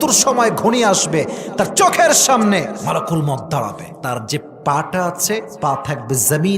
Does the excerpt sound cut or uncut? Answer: cut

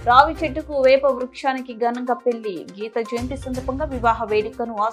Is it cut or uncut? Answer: uncut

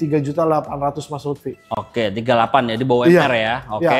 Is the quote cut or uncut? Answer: uncut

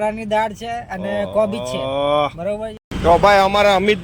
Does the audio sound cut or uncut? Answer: cut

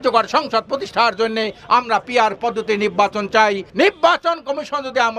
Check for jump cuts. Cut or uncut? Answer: cut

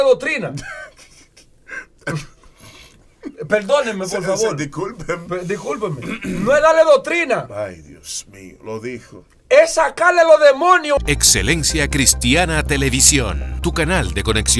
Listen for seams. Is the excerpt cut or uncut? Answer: cut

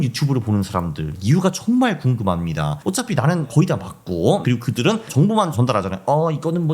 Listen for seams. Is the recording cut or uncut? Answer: cut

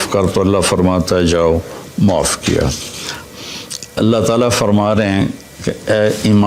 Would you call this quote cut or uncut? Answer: cut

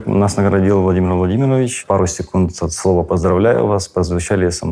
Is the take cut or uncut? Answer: cut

